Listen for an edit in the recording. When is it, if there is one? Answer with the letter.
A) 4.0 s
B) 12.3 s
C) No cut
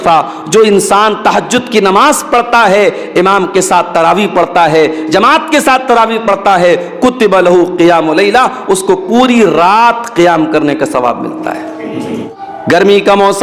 B